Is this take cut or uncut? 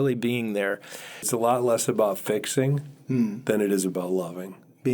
cut